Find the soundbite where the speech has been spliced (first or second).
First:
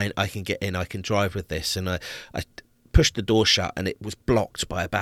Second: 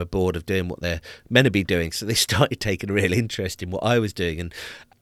first